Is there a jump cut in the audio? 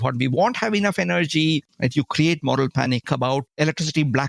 yes; 2 cuts; at 1.7 s, 3.1 s

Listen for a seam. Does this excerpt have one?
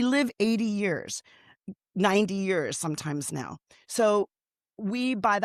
no; 0 cuts

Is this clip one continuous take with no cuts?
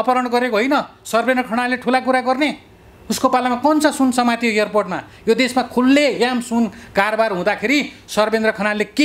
yes; 0 cuts

